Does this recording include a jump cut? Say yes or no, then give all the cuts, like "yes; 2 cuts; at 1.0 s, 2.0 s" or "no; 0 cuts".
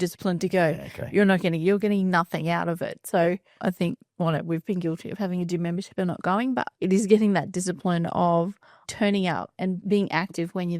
yes; 1 cut; at 9.8 s